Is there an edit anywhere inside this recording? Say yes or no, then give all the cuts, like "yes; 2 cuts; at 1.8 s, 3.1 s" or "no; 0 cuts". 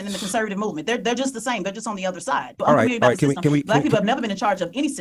yes; 1 cut; at 2.6 s